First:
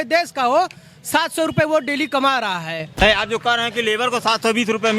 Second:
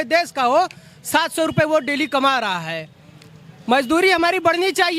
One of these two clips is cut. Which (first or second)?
first